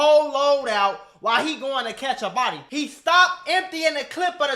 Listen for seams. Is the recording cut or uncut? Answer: cut